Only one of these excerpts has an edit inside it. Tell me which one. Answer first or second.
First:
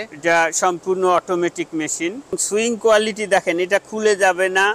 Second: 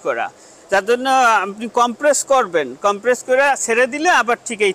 first